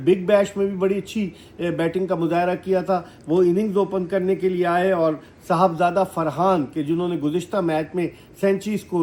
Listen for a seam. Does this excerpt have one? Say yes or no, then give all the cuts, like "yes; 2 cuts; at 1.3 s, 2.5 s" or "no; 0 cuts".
no; 0 cuts